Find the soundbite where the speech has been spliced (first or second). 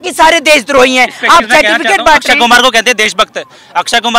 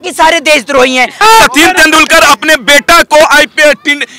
second